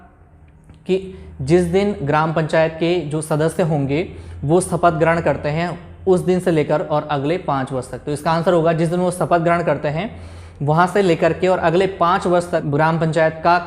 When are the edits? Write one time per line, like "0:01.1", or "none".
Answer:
0:12.7